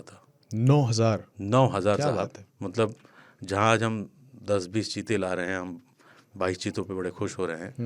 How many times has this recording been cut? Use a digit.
0